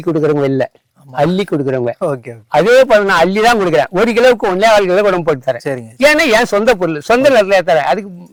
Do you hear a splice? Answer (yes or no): no